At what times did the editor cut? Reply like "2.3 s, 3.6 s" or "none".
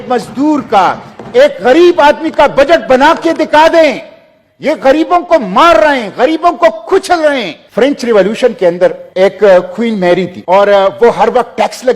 7.6 s, 9.0 s, 10.3 s